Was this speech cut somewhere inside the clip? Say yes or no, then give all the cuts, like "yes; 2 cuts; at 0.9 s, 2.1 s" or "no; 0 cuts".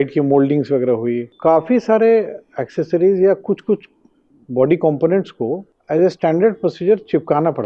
yes; 2 cuts; at 1.3 s, 5.7 s